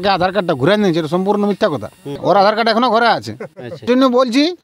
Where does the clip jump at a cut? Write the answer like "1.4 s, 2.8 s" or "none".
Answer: 2.2 s, 3.8 s